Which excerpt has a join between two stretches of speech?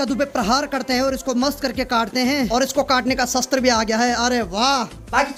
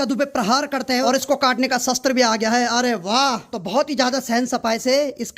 second; 2 cuts; at 1.0 s, 3.5 s

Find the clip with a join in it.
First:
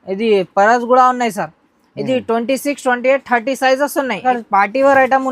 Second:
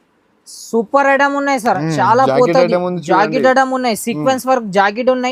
first; 1 cut; at 4.2 s

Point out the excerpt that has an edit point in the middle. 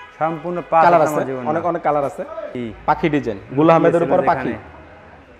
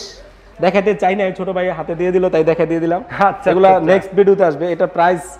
first; 1 cut; at 2.5 s

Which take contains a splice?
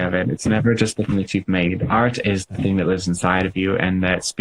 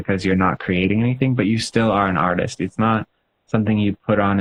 first; 1 cut; at 1.1 s

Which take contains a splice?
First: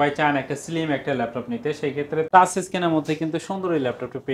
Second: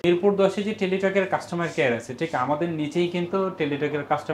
first; 1 cut; at 2.3 s

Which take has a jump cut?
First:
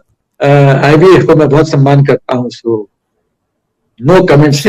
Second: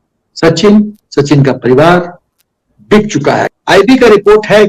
second; 1 cut; at 3.4 s

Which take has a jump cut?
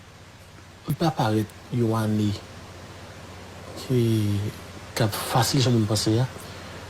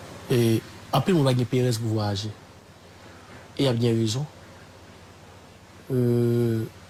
first; 1 cut; at 0.9 s

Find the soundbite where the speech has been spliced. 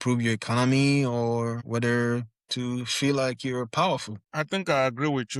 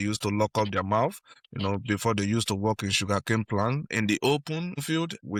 first; 1 cut; at 4.2 s

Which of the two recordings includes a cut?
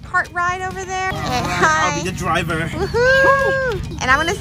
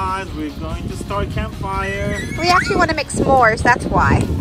first; 1 cut; at 1.1 s

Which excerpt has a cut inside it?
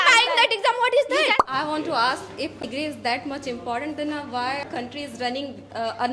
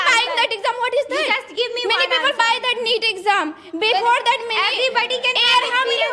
first; 3 cuts; at 1.4 s, 2.7 s, 4.6 s

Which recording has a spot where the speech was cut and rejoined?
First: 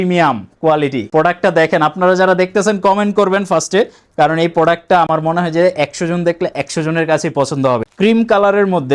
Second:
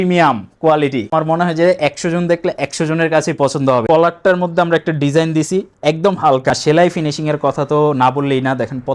second; 3 cuts; at 1.1 s, 3.8 s, 6.5 s

